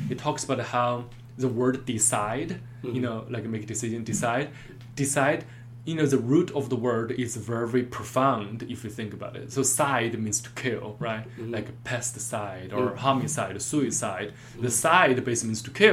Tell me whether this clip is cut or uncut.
uncut